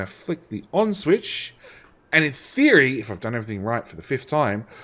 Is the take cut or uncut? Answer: uncut